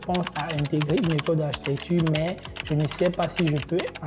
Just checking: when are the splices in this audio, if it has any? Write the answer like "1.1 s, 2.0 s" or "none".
none